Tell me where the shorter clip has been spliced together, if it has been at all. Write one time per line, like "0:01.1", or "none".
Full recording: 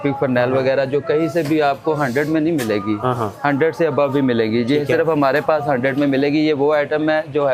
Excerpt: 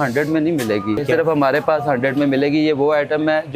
0:01.0